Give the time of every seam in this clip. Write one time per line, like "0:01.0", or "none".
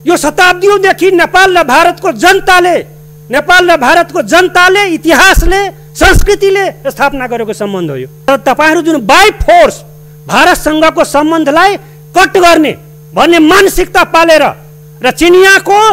0:08.3

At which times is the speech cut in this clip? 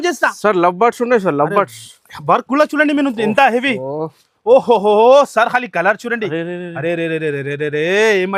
none

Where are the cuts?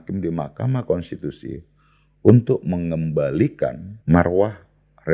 0:03.9

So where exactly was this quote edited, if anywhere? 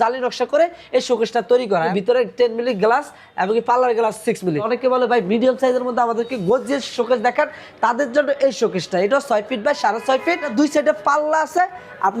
0:01.9
0:04.7
0:10.5

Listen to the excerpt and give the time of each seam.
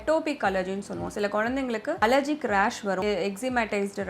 0:02.0
0:03.0

